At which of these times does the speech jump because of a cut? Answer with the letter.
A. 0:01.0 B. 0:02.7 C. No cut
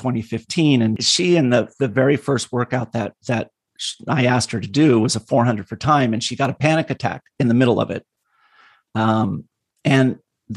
A